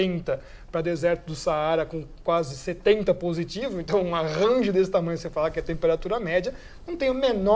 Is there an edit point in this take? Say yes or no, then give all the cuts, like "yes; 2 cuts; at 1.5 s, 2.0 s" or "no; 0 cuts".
no; 0 cuts